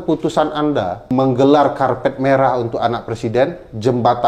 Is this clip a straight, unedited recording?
no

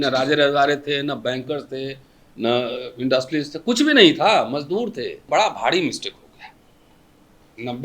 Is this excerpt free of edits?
no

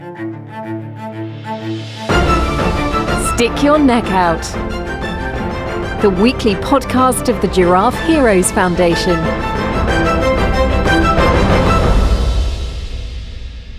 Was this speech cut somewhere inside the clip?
no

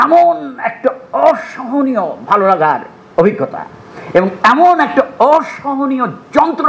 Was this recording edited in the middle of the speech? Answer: no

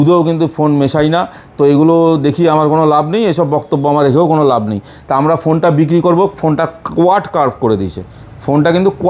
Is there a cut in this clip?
no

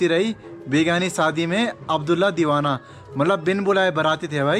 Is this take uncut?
yes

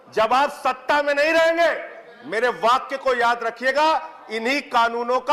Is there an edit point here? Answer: no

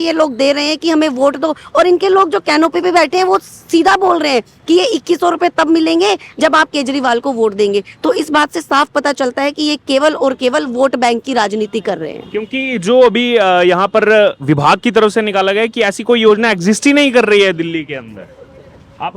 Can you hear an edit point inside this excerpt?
no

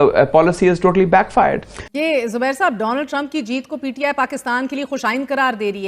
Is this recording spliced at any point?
yes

